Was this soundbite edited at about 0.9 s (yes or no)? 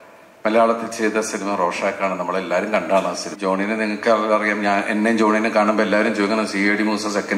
no